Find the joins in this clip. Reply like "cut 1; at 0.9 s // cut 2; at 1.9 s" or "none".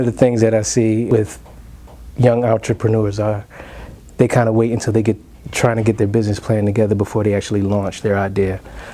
cut 1; at 1.1 s